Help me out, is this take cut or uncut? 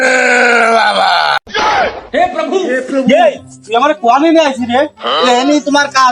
uncut